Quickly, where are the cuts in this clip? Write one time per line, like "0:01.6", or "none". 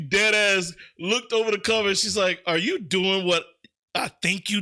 none